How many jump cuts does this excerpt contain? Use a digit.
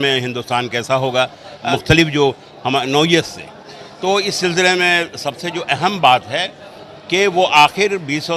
1